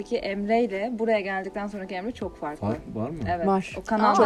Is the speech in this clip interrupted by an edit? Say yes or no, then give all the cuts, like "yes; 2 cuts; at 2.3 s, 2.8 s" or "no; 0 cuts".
no; 0 cuts